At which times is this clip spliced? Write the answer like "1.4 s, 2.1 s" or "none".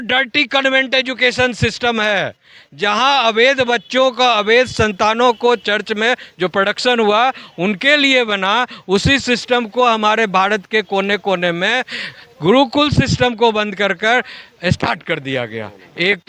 none